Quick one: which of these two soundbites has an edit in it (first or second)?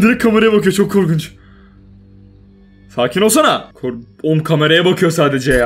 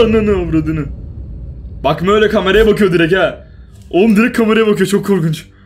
first